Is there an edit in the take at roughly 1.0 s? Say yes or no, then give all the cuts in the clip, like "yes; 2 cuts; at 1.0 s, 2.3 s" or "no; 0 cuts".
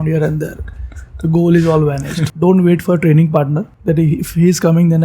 no; 2 cuts; at 2.2 s, 3.7 s